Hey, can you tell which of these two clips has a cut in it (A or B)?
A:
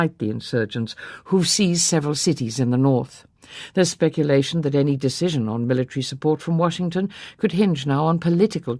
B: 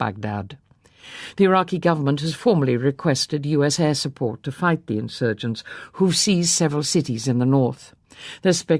A